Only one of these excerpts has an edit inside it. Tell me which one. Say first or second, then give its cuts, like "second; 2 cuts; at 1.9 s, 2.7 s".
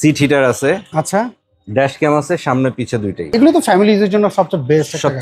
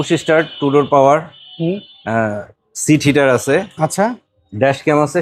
first; 1 cut; at 3.3 s